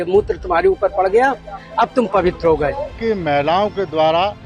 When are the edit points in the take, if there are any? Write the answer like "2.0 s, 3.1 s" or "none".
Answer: 3.0 s